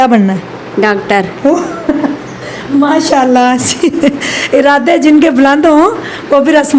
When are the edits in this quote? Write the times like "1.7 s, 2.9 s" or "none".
none